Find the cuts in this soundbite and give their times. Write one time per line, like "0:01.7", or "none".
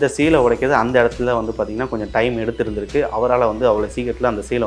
none

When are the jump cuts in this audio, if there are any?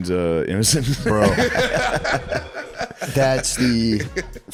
none

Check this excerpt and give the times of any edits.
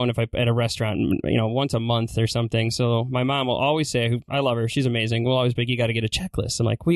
none

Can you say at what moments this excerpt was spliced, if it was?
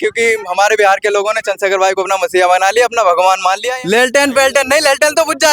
0:03.7

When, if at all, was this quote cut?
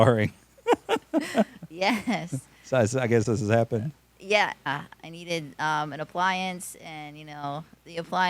0:04.7

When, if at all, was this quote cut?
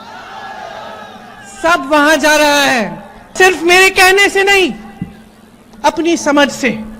0:03.3

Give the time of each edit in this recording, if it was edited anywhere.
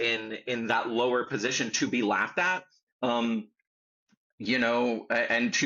none

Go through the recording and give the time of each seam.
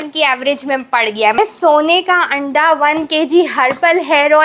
0:01.4

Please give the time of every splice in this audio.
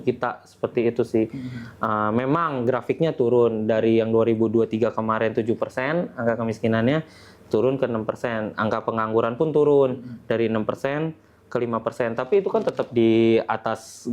none

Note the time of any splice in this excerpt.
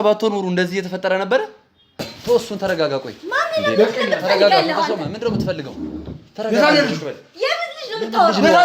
0:02.1

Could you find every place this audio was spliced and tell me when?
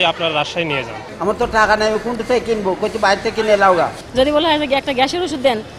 0:01.1
0:04.0

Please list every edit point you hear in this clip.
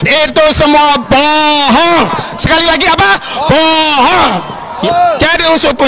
0:04.7

